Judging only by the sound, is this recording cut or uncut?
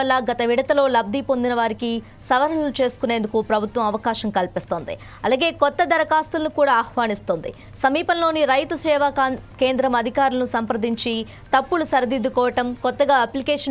uncut